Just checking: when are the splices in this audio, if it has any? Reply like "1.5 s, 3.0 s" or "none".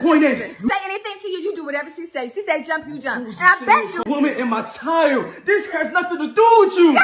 4.0 s